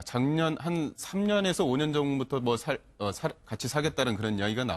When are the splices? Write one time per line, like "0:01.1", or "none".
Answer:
0:01.4